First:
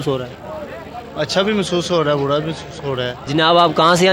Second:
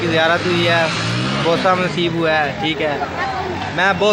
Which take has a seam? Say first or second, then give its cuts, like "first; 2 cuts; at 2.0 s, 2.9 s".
first; 1 cut; at 3.2 s